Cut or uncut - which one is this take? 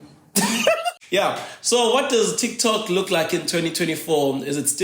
cut